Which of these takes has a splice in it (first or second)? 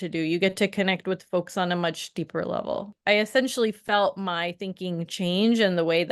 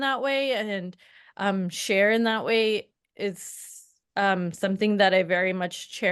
first